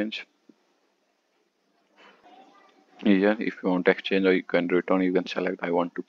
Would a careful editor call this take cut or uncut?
cut